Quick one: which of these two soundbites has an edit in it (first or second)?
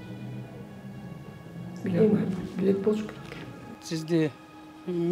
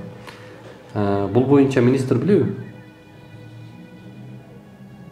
first